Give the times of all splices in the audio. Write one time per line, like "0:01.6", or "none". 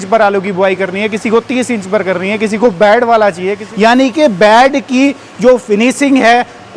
0:03.6

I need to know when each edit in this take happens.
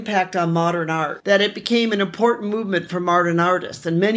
0:01.1

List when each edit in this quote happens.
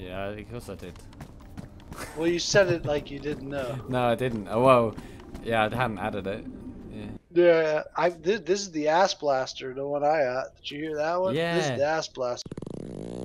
0:07.2

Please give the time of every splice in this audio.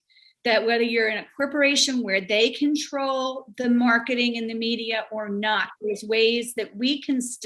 none

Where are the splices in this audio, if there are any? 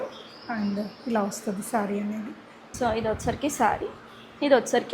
0:02.7

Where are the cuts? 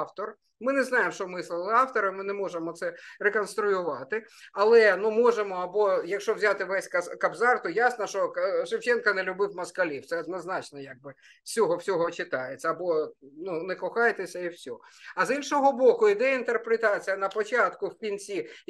none

